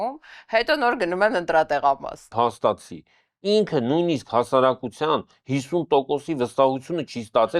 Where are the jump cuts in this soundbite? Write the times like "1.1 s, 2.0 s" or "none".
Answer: 2.3 s